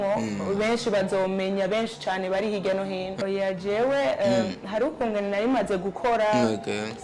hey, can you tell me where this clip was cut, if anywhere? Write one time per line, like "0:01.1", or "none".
0:03.2